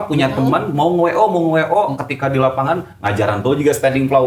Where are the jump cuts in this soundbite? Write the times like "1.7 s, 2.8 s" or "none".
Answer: none